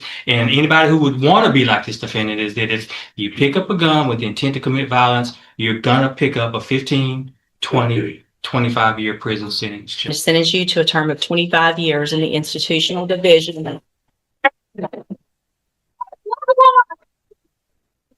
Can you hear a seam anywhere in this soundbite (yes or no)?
yes